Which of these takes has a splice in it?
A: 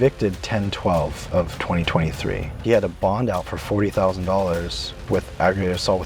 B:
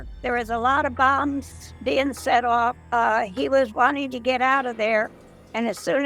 A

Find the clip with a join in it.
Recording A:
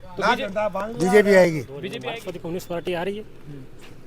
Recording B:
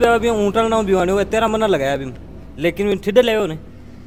A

